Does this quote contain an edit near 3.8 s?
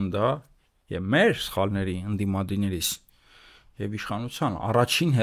no; 0 cuts

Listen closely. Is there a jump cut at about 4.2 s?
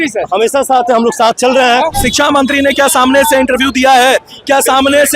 no; 1 cut; at 1.9 s

